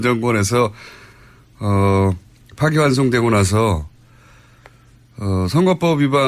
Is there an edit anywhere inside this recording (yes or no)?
no